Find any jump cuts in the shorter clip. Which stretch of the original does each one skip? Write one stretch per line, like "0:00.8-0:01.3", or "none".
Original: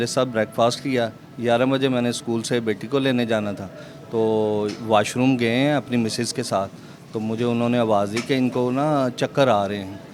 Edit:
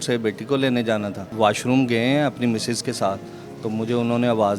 0:03.7-0:04.8